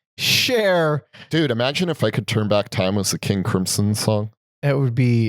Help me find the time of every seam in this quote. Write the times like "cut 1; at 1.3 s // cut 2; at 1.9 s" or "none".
cut 1; at 1.2 s